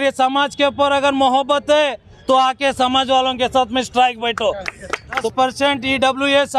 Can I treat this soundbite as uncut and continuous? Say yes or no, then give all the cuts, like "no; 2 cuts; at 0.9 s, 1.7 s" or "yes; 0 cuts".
no; 2 cuts; at 2.1 s, 5.2 s